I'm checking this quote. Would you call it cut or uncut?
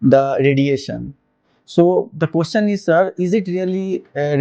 uncut